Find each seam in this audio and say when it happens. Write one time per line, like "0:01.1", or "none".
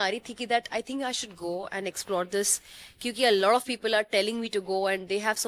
none